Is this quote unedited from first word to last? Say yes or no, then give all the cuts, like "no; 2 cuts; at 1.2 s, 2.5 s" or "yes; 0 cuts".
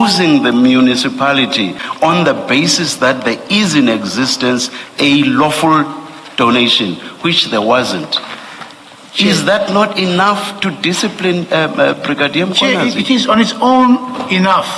no; 1 cut; at 1.8 s